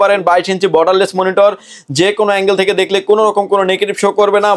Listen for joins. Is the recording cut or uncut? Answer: uncut